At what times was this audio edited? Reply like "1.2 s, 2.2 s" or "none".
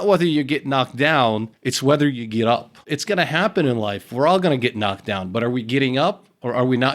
2.9 s